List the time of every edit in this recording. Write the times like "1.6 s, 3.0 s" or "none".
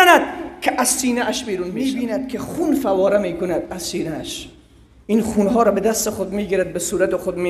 1.7 s